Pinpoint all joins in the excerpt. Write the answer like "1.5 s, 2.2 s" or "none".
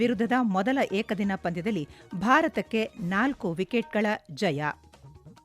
none